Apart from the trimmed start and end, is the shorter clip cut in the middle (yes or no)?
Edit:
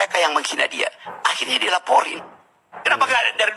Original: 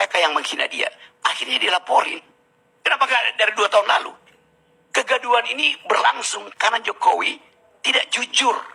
no